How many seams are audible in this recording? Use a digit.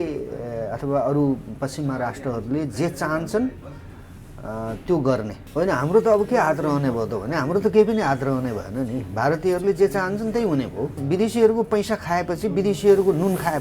2